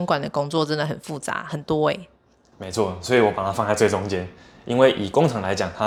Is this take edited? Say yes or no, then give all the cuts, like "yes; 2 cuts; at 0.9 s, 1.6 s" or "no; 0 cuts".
no; 0 cuts